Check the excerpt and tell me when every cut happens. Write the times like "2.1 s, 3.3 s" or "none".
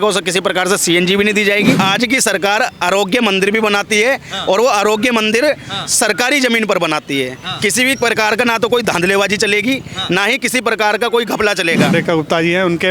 1.8 s, 11.9 s